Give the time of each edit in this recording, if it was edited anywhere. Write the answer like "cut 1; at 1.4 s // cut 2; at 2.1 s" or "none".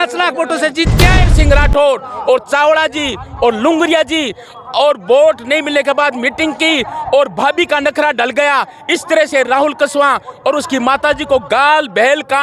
cut 1; at 1.3 s